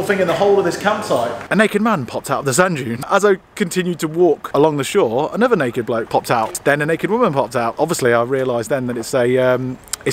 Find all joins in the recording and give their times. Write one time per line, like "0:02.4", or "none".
0:01.4
0:03.1
0:06.5
0:07.7